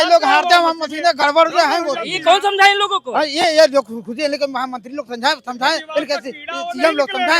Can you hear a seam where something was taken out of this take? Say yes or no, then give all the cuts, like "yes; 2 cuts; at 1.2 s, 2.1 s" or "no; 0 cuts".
no; 0 cuts